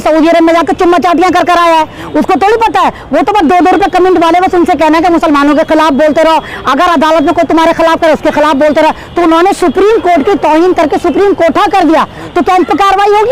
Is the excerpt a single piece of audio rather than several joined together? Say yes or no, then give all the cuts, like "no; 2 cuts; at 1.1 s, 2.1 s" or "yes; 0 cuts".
yes; 0 cuts